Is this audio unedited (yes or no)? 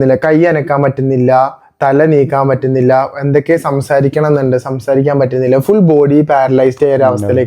yes